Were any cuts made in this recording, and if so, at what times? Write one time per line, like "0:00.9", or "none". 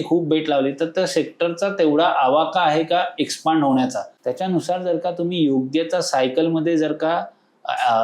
0:04.1